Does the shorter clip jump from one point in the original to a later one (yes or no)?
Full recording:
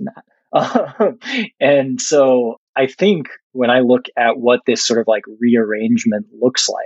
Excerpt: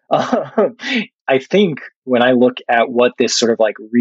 yes